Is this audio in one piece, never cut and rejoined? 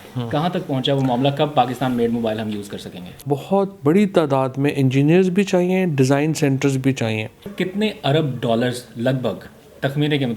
no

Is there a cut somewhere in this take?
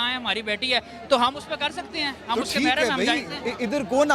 no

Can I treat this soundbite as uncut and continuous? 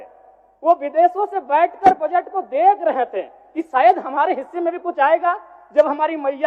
yes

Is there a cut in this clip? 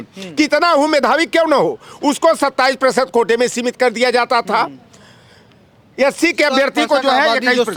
no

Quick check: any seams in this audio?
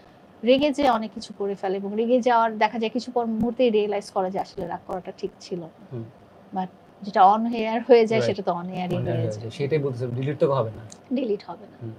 no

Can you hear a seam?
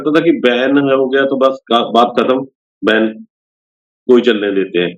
no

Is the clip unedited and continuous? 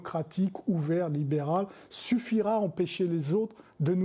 yes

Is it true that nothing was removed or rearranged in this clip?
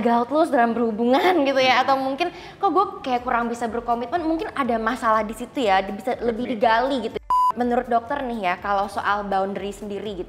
no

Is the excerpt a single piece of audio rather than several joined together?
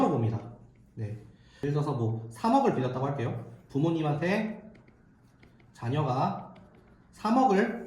no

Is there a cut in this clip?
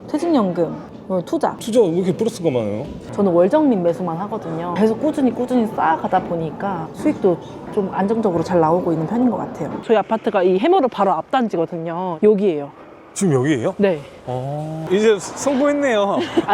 yes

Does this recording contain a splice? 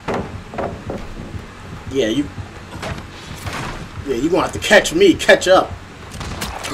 no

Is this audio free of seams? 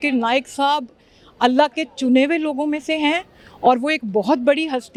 yes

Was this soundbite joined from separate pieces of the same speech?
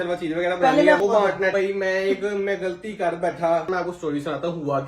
yes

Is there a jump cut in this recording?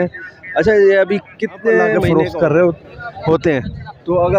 yes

